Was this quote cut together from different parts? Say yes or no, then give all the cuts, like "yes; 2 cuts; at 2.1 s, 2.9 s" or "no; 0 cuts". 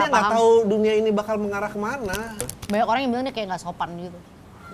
yes; 1 cut; at 2.3 s